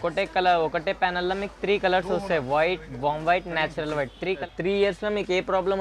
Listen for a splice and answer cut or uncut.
cut